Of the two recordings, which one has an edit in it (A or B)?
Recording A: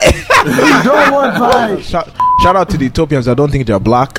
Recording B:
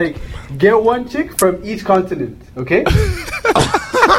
A